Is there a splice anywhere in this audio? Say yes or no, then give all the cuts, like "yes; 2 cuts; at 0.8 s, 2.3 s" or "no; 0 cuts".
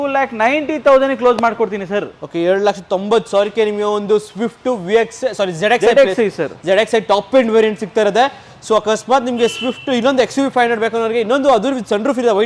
no; 0 cuts